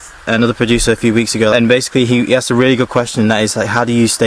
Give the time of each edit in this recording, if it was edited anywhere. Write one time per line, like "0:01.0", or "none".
0:01.5